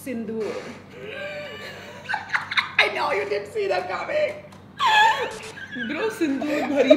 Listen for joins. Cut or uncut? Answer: uncut